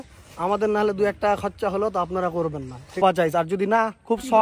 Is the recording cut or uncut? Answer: cut